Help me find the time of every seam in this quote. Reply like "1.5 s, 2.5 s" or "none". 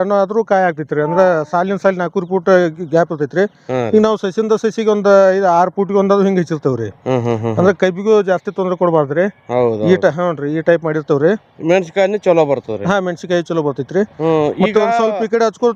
none